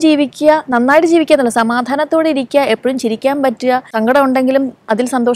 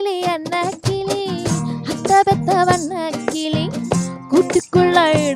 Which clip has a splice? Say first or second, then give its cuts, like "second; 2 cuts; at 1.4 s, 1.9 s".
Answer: first; 1 cut; at 3.9 s